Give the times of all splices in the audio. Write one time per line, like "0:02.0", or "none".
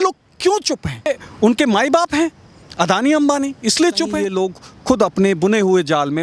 0:01.1
0:04.2